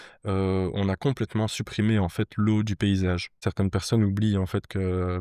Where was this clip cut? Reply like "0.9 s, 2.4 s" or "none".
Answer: 3.4 s